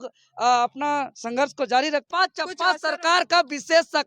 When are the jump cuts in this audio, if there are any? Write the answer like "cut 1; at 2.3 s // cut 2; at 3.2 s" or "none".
cut 1; at 2.1 s